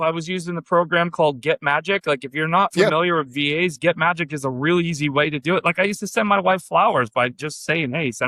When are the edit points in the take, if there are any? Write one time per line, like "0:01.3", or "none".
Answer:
none